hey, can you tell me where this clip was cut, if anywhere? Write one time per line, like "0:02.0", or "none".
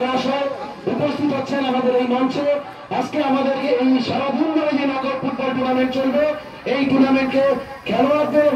none